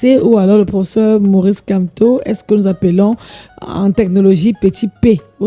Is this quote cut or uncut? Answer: uncut